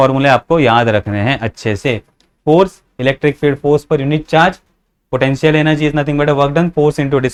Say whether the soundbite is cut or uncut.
uncut